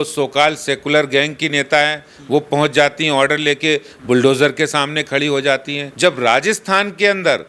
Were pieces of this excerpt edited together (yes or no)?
yes